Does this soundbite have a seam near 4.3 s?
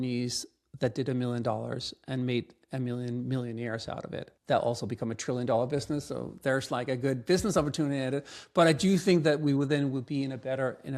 yes; 1 cut; at 4.3 s

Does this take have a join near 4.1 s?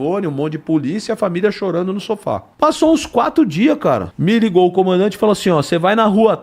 yes; 2 cuts; at 2.5 s, 4.1 s

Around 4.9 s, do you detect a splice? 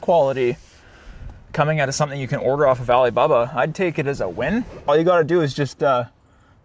yes; 1 cut; at 4.9 s

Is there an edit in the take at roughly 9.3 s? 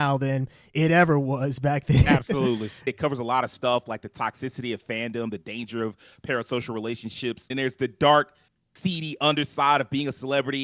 no; 2 cuts; at 2.9 s, 7.5 s

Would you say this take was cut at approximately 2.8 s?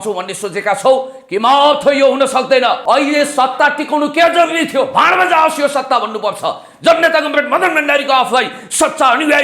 yes; 1 cut; at 2.8 s

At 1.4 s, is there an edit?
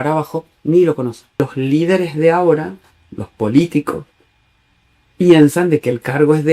yes; 1 cut; at 1.4 s

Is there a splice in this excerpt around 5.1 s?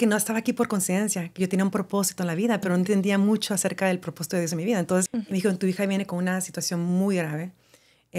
yes; 1 cut; at 5.1 s

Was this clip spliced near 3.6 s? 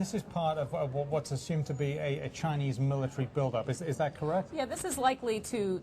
yes; 1 cut; at 3.6 s

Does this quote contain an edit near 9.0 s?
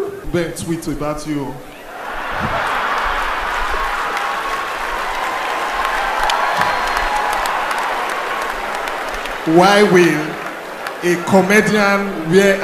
no; 0 cuts

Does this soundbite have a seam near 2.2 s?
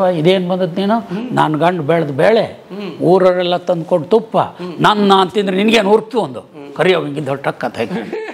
no; 0 cuts

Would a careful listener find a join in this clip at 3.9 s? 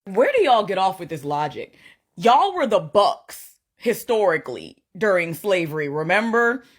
yes; 2 cuts; at 1.8 s, 3.9 s

